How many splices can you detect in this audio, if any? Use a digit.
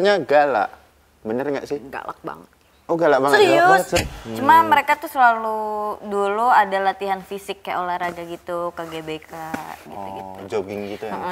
1